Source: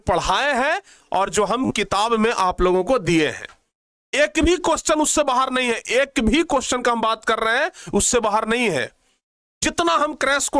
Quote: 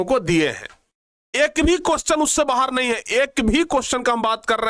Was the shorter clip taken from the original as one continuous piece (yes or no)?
yes